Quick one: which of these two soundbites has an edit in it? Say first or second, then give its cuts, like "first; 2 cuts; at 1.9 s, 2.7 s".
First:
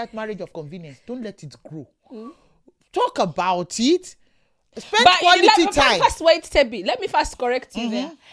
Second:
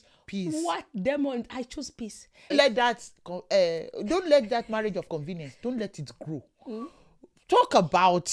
second; 1 cut; at 2.5 s